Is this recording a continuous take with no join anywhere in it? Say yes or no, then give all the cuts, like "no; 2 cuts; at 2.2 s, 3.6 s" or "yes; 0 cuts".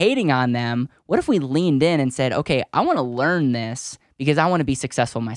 yes; 0 cuts